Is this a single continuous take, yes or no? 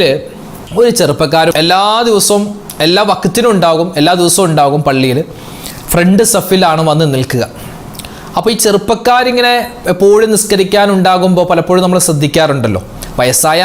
no